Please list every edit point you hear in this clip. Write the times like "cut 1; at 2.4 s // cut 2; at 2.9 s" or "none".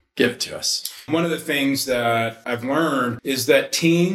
cut 1; at 1.1 s // cut 2; at 2.8 s